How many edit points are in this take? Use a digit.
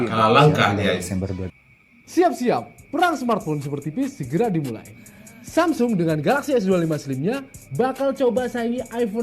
1